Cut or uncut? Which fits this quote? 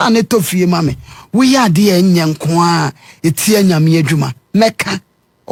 uncut